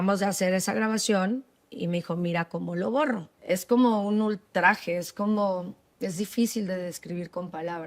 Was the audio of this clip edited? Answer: yes; 1 cut; at 3.3 s

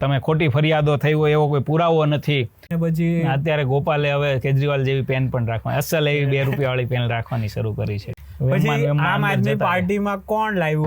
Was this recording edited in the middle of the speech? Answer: yes; 2 cuts; at 2.6 s, 8.0 s

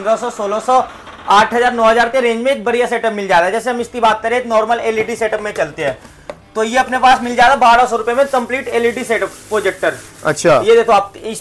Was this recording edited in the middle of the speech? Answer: no; 0 cuts

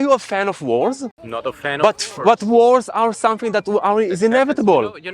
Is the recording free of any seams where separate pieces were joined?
no; 1 cut; at 1.2 s

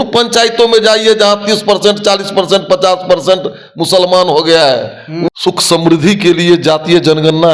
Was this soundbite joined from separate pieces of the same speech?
yes; 1 cut; at 5.1 s

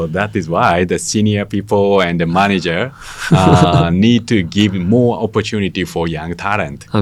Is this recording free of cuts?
yes; 0 cuts

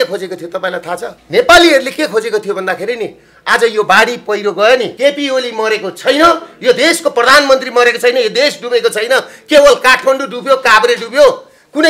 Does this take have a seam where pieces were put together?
yes; 2 cuts; at 1.2 s, 4.9 s

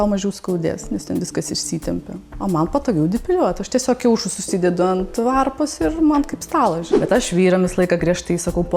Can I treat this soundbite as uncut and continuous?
no; 1 cut; at 6.9 s

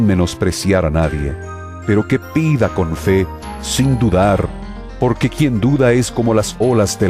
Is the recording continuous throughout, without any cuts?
yes; 0 cuts

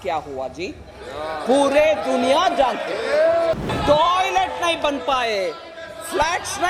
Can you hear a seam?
yes; 1 cut; at 3.6 s

